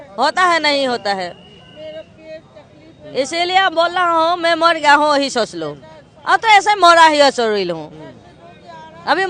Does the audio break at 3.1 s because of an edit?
no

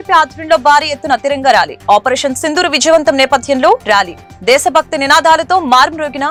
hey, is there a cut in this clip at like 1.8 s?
no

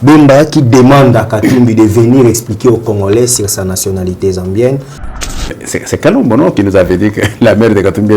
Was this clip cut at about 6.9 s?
no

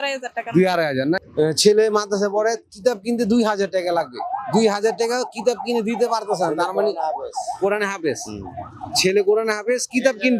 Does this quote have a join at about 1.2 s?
yes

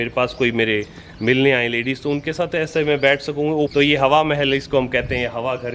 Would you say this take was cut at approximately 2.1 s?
no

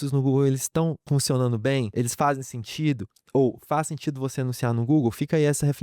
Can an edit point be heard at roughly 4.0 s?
no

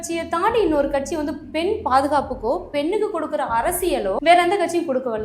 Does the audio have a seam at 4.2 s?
yes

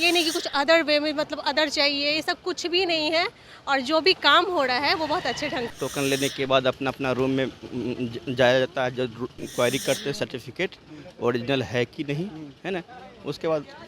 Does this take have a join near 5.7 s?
yes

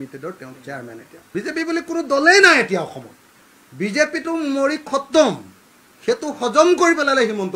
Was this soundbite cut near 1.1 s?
yes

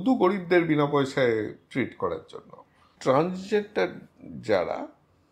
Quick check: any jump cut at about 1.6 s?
yes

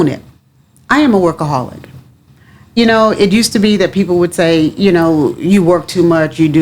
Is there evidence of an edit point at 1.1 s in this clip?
yes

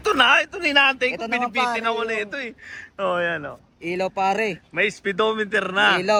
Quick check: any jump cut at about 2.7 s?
no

